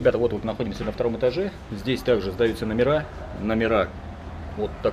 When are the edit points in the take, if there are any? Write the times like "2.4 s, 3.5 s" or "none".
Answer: none